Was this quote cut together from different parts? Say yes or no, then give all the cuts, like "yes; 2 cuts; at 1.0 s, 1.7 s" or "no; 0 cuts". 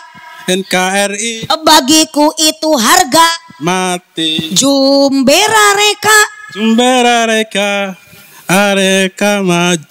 no; 0 cuts